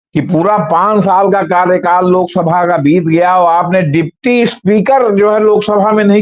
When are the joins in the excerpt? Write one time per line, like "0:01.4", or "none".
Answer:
none